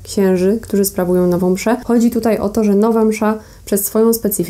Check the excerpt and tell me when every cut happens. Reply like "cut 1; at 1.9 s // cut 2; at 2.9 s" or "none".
cut 1; at 1.8 s